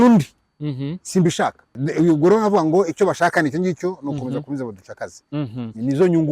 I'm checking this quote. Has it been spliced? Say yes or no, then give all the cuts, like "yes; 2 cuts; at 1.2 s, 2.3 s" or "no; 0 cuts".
yes; 1 cut; at 1.8 s